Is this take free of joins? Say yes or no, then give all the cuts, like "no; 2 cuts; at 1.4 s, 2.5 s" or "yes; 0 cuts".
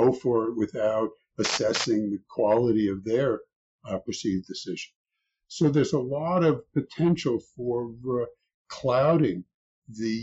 yes; 0 cuts